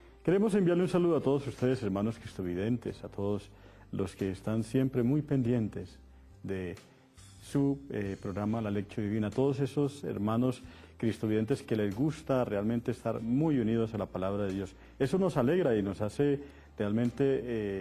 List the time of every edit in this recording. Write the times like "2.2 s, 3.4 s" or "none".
15.6 s